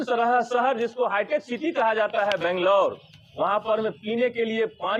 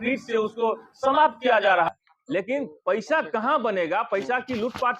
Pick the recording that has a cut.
second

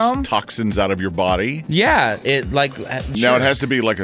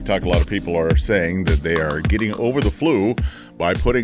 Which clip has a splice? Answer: first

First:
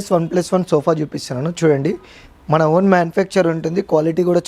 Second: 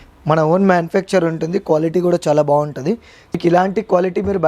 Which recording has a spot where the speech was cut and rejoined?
second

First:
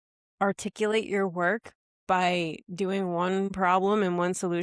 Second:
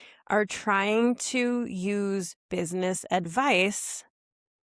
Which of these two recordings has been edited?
first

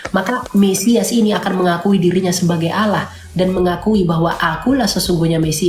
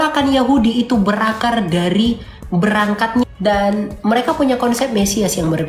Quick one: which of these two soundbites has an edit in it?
second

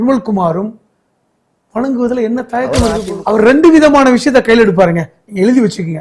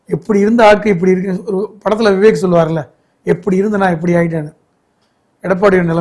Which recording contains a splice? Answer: first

